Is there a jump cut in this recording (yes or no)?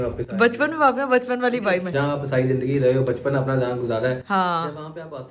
yes